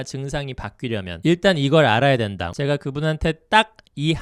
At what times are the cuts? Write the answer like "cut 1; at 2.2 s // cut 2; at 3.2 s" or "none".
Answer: cut 1; at 2.4 s